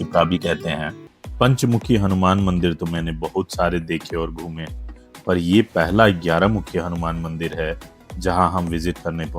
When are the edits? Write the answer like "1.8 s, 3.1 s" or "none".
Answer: 1.0 s